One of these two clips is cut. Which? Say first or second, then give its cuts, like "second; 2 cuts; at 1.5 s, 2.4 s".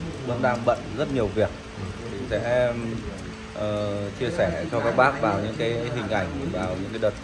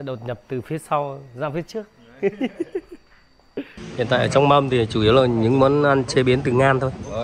second; 1 cut; at 3.8 s